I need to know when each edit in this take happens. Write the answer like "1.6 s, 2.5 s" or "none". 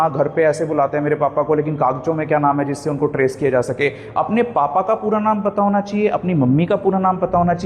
none